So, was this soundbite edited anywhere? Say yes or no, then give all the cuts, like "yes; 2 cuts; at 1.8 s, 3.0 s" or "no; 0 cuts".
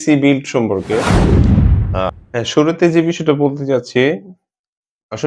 yes; 2 cuts; at 1.0 s, 1.7 s